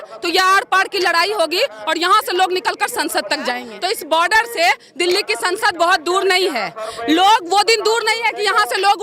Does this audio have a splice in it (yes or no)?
yes